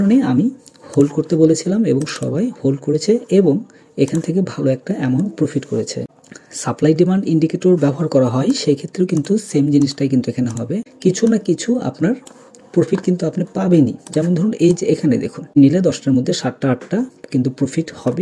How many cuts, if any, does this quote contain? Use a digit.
3